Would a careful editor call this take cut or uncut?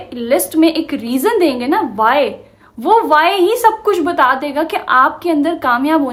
uncut